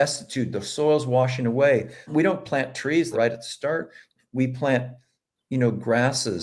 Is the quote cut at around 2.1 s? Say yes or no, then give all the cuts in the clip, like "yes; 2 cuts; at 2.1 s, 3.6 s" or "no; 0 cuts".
yes; 2 cuts; at 2.1 s, 3.1 s